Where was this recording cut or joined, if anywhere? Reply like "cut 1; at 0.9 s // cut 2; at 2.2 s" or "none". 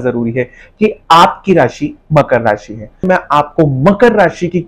cut 1; at 3.0 s